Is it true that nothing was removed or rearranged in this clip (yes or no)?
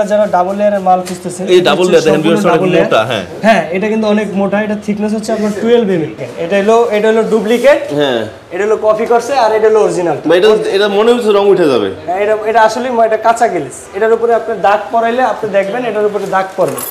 no